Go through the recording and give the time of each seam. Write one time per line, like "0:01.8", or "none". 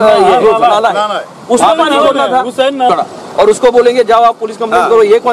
0:02.9

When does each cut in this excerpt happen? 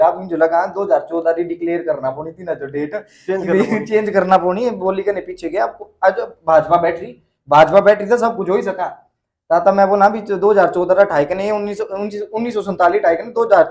none

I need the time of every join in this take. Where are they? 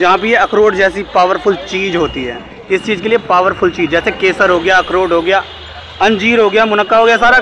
none

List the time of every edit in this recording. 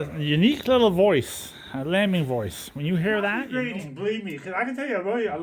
0:03.4

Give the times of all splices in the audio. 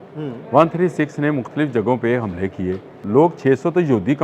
0:03.0

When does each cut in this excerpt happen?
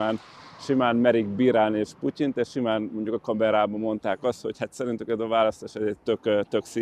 none

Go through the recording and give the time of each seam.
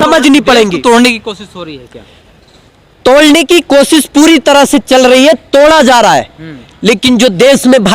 none

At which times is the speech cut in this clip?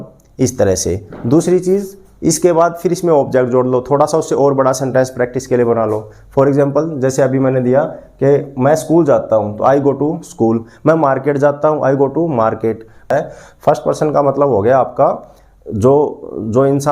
0:13.0

